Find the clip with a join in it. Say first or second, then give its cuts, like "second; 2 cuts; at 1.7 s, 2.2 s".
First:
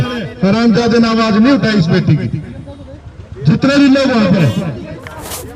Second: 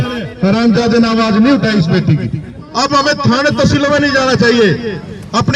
second; 1 cut; at 2.6 s